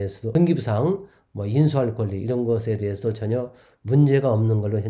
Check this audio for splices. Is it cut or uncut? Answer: uncut